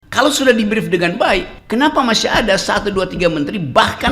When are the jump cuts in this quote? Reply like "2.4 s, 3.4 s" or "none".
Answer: 1.6 s